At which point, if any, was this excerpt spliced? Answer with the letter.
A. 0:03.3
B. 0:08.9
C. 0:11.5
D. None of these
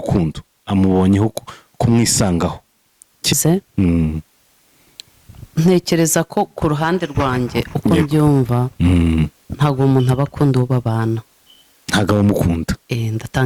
A